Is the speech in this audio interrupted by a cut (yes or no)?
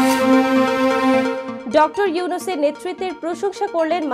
yes